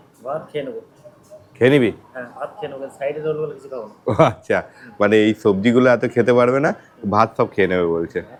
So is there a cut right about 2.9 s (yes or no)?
no